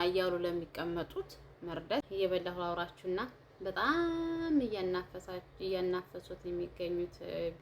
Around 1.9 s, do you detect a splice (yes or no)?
yes